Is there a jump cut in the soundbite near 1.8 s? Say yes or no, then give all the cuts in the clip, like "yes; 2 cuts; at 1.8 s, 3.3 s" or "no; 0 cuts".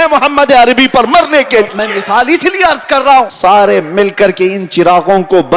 yes; 2 cuts; at 1.8 s, 3.3 s